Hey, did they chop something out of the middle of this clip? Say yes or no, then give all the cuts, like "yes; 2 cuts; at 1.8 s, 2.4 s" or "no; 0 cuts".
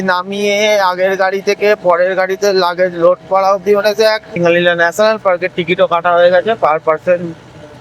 yes; 1 cut; at 4.4 s